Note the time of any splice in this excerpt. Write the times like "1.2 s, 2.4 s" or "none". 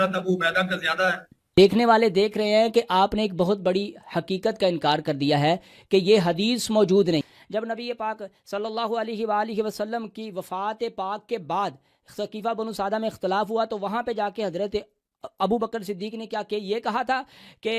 1.3 s, 7.4 s